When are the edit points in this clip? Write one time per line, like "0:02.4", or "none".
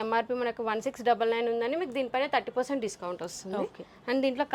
none